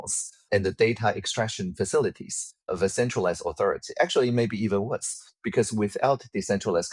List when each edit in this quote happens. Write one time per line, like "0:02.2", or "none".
none